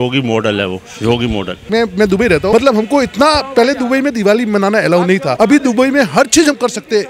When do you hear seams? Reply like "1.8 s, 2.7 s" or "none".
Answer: 1.6 s, 2.5 s, 5.3 s

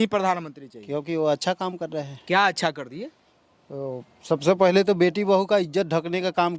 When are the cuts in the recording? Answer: none

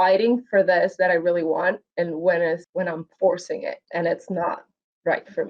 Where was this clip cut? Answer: 2.7 s, 3.8 s

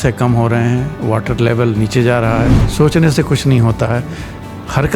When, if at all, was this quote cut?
2.7 s

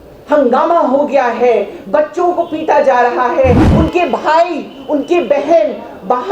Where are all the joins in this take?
3.7 s

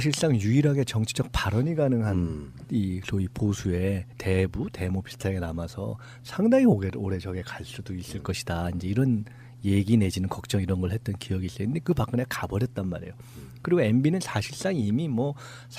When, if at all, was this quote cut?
7.1 s

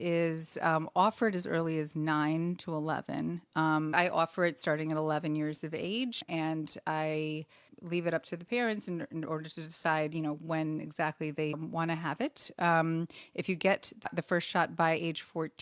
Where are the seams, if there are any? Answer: 3.9 s, 6.2 s, 7.8 s, 11.6 s, 14.1 s

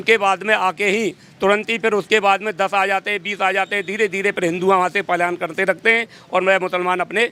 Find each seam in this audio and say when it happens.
none

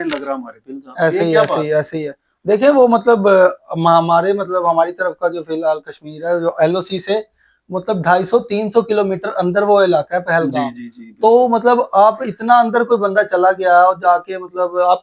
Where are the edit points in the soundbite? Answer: none

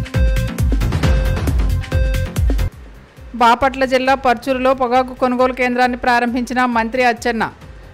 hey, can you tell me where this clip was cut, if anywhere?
1.0 s

